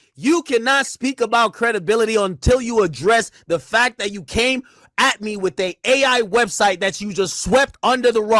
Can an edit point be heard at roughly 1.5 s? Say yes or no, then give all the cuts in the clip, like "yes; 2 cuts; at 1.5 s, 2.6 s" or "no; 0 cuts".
no; 0 cuts